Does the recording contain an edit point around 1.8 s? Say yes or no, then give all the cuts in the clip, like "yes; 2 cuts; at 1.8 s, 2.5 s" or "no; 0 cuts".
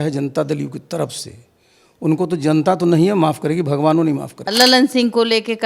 no; 1 cut; at 4.5 s